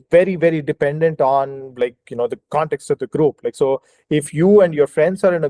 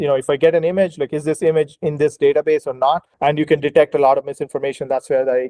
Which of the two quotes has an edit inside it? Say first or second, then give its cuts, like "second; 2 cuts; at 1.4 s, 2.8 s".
second; 1 cut; at 3.1 s